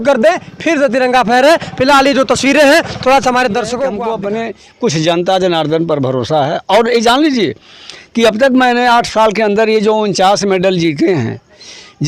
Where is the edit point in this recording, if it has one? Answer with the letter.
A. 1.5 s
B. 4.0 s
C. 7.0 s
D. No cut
B